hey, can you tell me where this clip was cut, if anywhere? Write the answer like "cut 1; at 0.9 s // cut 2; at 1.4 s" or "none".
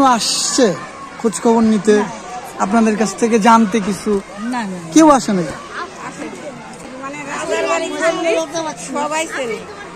cut 1; at 6.9 s